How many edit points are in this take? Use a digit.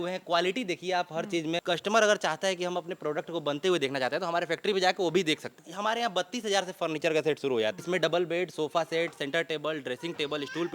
3